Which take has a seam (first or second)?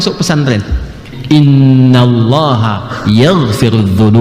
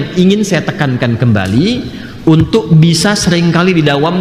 first